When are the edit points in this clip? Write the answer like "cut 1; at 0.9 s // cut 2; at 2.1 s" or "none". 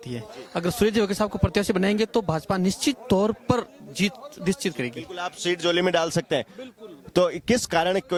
none